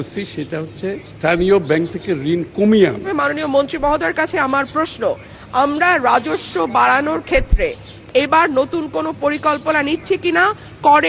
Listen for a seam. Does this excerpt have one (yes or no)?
yes